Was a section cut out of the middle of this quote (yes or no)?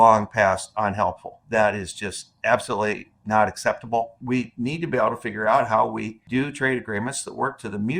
yes